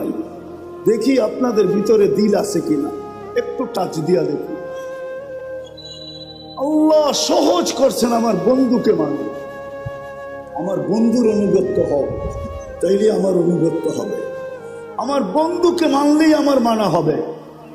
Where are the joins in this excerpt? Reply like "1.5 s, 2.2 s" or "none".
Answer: none